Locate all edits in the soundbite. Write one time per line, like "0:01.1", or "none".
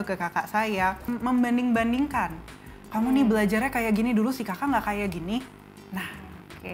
0:01.1